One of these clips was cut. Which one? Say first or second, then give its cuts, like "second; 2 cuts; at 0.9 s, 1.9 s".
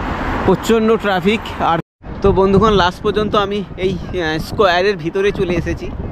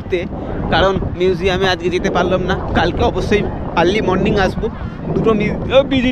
first; 1 cut; at 1.9 s